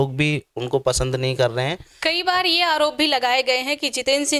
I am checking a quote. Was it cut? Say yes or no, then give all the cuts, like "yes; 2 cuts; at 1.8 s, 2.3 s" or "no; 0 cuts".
yes; 1 cut; at 1.9 s